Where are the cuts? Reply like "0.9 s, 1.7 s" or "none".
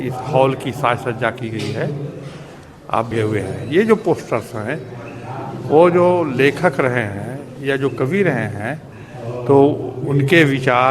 3.1 s